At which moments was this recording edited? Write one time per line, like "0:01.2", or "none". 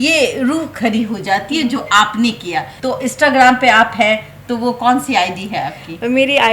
0:02.7